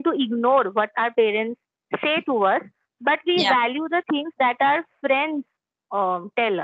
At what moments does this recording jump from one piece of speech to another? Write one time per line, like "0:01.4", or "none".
none